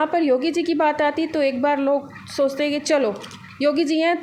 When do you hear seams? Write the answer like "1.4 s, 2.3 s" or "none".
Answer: none